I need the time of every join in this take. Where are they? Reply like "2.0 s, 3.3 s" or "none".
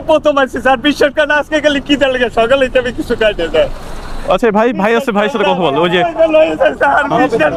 none